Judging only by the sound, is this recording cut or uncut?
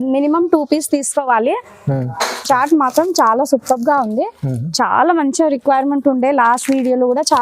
cut